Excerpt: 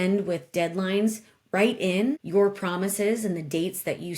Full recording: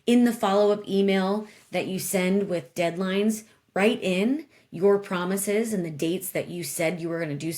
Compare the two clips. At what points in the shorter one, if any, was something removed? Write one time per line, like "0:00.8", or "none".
0:02.2